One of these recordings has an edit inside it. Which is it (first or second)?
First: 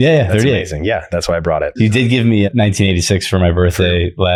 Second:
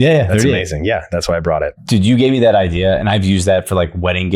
second